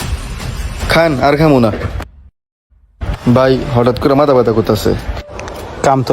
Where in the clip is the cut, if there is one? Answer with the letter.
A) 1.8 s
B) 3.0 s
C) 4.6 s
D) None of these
B